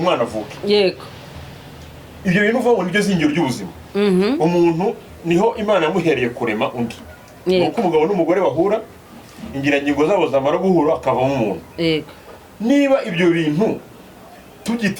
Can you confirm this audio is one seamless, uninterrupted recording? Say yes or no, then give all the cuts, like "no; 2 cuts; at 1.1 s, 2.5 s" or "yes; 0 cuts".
yes; 0 cuts